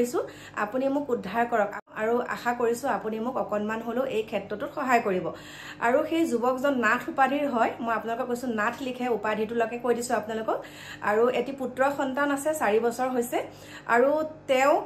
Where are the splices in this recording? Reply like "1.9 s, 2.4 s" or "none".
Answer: 1.8 s

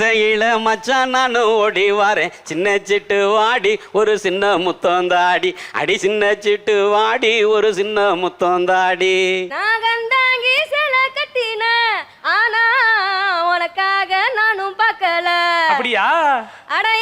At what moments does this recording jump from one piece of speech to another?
9.5 s

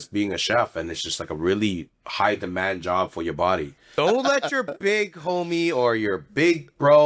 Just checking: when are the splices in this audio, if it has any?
3.9 s

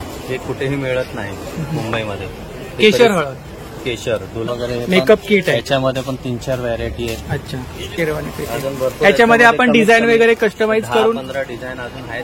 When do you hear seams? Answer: 4.5 s, 7.9 s

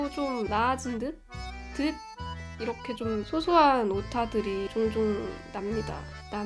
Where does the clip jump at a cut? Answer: none

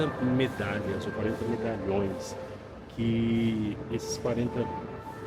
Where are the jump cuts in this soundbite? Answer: none

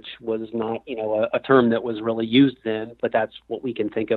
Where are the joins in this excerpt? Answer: 2.9 s

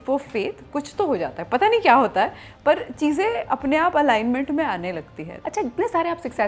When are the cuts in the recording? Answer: 5.3 s

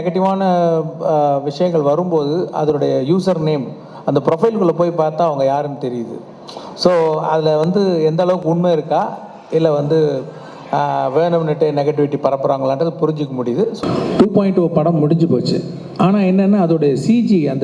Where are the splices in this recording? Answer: 13.7 s

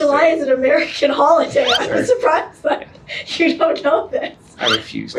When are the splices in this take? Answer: none

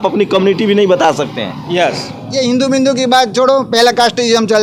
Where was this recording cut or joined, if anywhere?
2.2 s

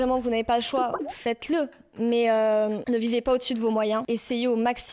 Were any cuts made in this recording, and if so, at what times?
1.1 s, 4.0 s

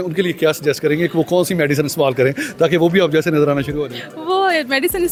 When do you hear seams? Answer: none

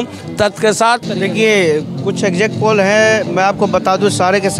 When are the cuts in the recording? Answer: 1.0 s

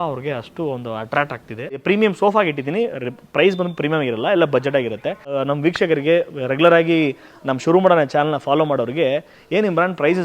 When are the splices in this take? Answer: 1.8 s, 5.3 s

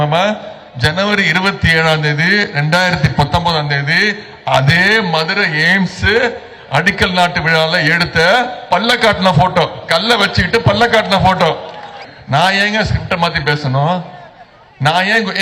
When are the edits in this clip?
12.1 s

